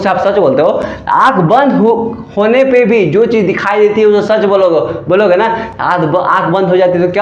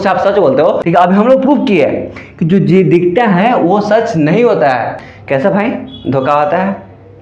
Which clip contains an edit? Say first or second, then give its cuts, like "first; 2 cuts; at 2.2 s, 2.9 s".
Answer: second; 2 cuts; at 0.8 s, 5.1 s